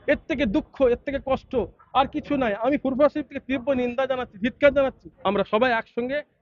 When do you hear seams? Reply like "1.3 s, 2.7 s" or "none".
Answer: 5.1 s